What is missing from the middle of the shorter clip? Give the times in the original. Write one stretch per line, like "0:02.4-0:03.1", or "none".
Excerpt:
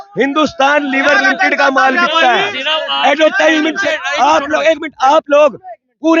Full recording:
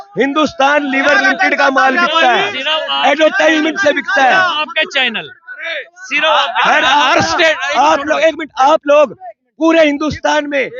0:03.9-0:07.4

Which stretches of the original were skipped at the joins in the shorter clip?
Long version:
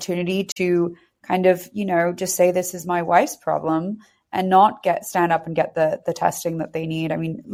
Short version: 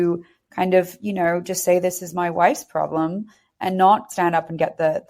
0:04.8-0:05.0

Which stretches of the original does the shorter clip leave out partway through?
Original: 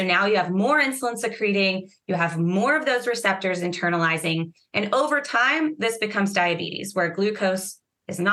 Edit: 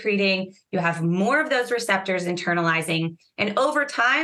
none

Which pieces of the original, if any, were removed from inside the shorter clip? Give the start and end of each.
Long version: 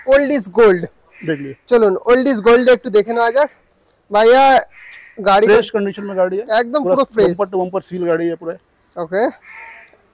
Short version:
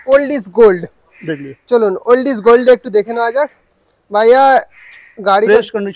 none

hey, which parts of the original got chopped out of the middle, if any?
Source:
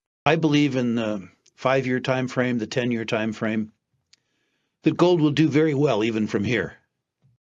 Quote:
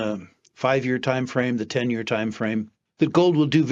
0:03.8-0:04.6

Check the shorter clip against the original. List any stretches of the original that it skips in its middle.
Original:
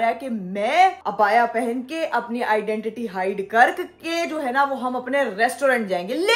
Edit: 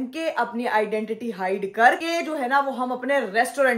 0:03.8-0:04.0

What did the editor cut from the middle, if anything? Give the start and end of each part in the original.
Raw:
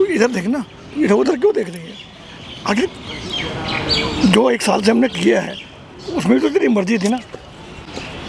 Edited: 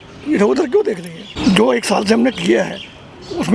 0:02.0-0:04.1

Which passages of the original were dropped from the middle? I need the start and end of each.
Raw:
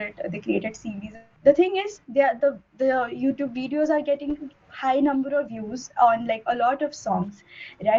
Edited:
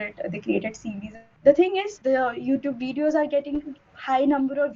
0:01.9-0:02.7

